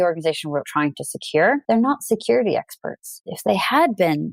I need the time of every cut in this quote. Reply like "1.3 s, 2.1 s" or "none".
1.6 s, 3.2 s

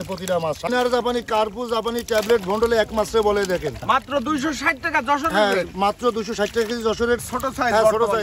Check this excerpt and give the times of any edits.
0.7 s, 3.8 s, 7.2 s

